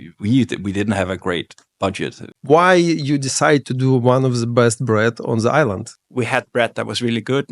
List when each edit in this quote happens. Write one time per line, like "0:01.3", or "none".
0:02.3
0:05.9